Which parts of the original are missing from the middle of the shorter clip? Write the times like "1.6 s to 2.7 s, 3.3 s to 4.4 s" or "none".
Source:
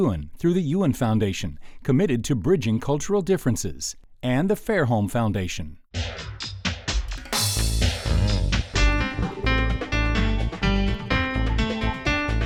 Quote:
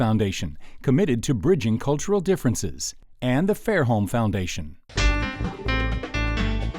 5.9 s to 8.7 s

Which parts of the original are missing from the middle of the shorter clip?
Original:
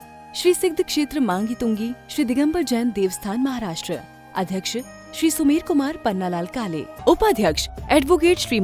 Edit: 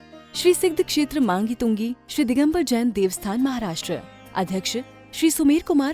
none

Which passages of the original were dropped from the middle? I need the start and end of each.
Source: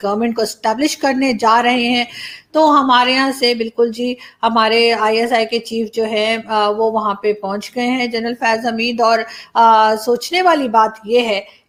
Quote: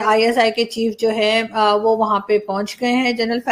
none

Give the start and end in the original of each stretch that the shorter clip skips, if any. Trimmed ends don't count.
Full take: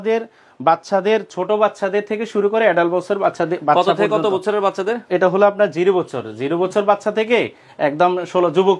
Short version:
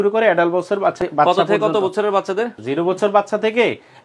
3.4 s to 3.5 s, 5.0 s to 6.3 s

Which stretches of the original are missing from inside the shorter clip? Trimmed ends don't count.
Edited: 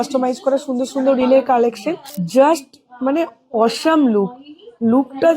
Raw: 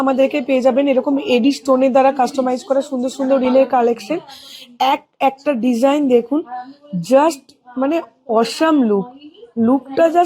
4.4 s to 6.9 s

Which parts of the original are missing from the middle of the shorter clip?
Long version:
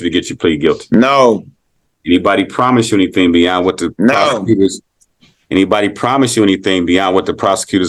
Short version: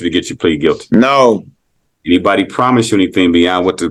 none

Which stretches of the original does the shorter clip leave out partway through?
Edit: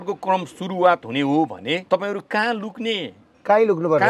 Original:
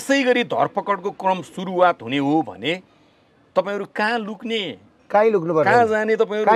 2.8 s to 3.5 s

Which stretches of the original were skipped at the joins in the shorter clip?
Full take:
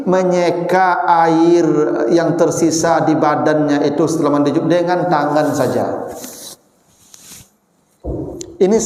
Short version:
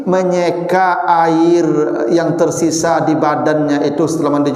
none

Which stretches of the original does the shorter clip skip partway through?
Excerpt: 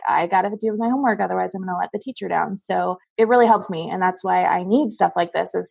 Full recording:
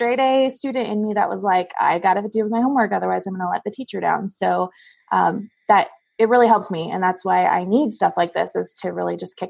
4.7 s to 6.0 s

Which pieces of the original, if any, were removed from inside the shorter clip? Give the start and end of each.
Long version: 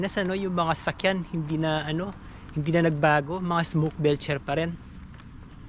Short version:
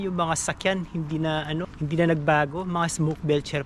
2.1 s to 2.5 s

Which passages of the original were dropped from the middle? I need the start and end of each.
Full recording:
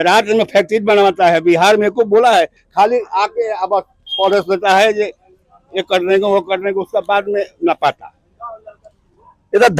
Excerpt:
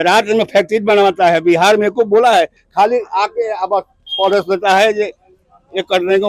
none

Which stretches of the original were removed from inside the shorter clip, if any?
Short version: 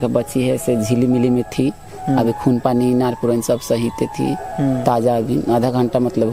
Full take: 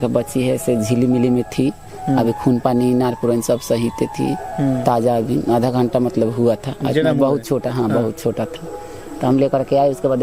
none

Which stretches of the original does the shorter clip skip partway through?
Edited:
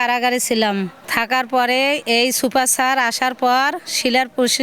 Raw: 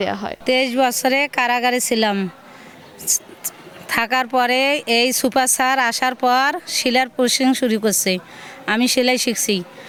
2.4 s to 3.8 s

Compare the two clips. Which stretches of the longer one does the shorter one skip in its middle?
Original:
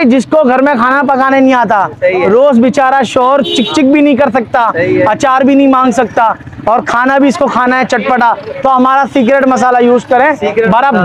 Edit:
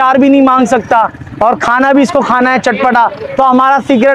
none

